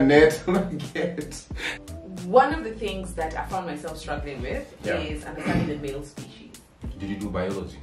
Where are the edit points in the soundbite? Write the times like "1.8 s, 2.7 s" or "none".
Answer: 1.9 s